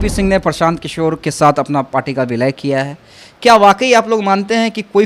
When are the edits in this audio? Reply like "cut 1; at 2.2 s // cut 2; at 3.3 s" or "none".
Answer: none